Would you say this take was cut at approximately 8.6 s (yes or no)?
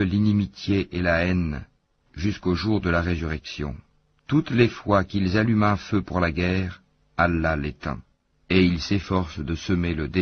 yes